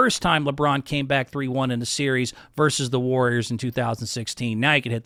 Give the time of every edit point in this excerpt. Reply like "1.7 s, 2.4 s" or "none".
none